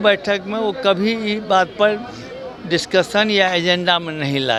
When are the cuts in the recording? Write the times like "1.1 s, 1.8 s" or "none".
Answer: none